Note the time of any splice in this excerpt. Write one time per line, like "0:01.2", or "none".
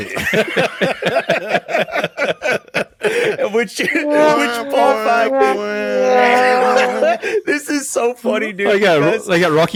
none